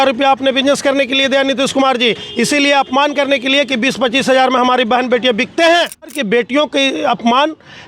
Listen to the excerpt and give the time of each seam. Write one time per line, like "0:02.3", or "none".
0:06.2